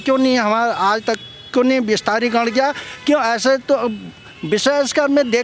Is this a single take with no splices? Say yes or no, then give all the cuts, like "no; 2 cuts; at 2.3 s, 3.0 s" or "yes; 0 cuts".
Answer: yes; 0 cuts